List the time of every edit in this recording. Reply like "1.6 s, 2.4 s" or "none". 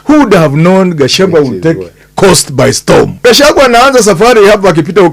3.1 s